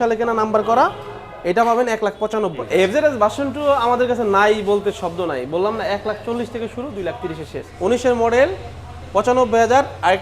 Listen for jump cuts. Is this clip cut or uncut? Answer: cut